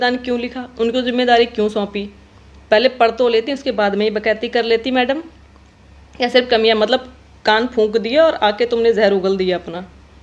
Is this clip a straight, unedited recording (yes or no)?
yes